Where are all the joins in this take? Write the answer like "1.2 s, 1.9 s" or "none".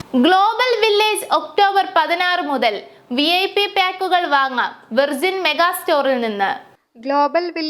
none

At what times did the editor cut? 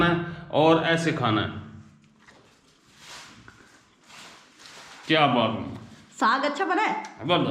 none

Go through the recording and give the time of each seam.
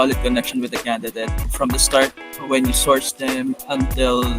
1.5 s

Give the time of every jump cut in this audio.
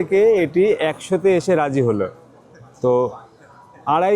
none

